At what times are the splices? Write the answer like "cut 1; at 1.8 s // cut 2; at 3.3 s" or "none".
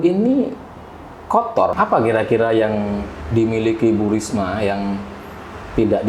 cut 1; at 1.7 s